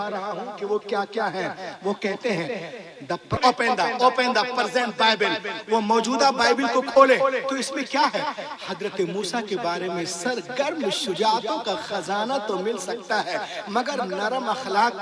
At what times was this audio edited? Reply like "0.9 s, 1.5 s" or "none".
3.3 s